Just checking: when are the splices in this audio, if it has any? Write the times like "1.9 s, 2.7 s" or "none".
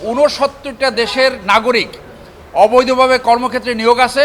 none